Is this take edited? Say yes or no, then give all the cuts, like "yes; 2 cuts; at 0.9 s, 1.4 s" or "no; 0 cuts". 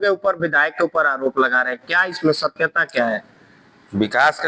no; 0 cuts